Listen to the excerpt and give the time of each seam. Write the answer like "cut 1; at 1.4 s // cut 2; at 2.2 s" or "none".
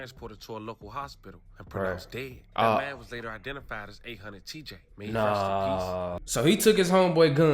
cut 1; at 6.2 s